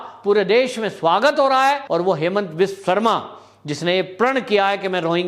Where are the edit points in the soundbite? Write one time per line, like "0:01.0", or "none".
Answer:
0:01.8